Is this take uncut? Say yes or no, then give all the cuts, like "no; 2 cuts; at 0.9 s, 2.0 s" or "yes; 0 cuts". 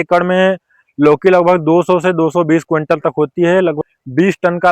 no; 1 cut; at 3.8 s